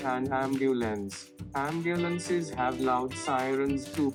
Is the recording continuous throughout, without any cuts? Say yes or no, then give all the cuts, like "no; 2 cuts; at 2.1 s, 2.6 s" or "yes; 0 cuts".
yes; 0 cuts